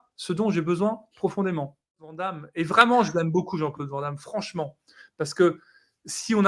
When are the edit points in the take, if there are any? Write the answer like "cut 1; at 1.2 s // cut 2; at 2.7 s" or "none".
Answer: cut 1; at 2.2 s